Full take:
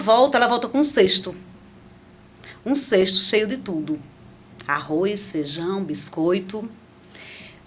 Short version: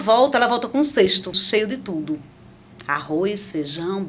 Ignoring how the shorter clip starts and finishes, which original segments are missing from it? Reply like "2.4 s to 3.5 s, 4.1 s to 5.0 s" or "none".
1.4 s to 3.2 s